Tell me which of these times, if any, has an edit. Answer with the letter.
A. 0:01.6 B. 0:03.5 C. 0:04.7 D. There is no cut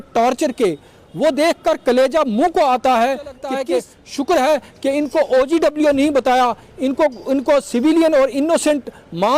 B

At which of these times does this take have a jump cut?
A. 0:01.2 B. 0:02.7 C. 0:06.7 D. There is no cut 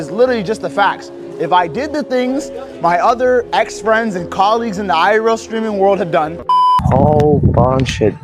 C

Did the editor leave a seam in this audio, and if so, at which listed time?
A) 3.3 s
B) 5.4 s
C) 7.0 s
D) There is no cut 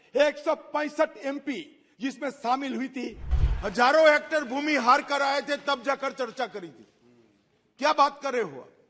A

